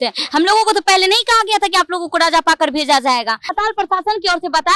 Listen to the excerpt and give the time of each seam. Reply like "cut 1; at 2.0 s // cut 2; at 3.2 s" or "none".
cut 1; at 3.5 s